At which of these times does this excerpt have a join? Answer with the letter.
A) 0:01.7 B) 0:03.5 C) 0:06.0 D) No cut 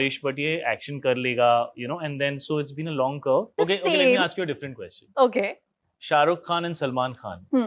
B